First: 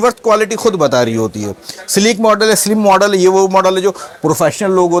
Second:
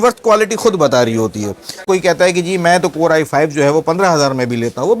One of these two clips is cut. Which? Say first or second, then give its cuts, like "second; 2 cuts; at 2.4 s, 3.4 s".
second; 1 cut; at 1.8 s